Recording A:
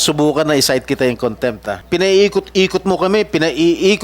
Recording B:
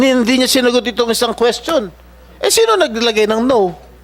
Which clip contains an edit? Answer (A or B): A